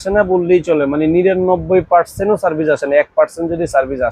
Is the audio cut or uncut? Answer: uncut